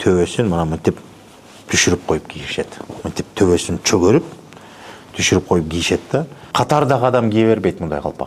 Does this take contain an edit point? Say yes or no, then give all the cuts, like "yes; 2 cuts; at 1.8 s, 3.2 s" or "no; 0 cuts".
yes; 1 cut; at 6.4 s